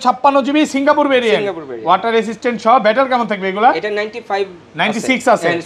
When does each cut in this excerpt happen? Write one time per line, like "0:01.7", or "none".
none

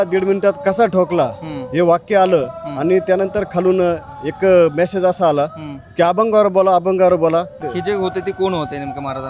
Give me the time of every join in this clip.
0:07.6

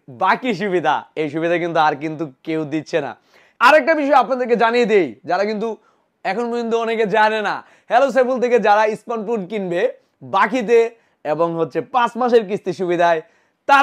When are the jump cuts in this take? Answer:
0:03.5

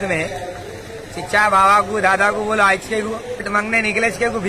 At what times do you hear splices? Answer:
0:03.4

